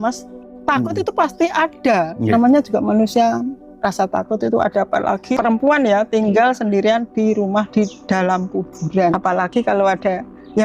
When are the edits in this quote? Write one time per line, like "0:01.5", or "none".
0:02.2
0:05.4
0:09.1